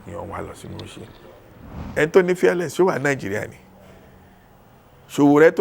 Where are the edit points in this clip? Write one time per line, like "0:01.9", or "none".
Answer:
0:01.8